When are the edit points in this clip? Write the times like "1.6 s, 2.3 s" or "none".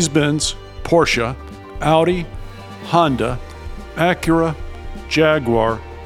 none